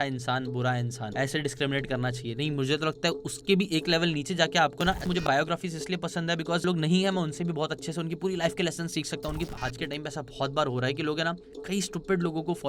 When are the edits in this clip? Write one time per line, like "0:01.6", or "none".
0:01.0
0:05.2
0:06.6
0:09.3